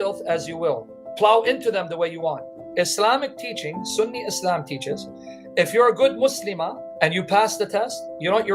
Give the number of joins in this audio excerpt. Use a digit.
3